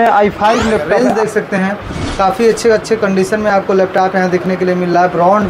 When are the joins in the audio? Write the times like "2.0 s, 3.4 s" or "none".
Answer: 1.0 s